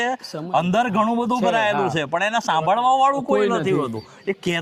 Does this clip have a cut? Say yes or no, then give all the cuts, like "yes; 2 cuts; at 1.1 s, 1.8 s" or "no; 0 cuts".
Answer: no; 0 cuts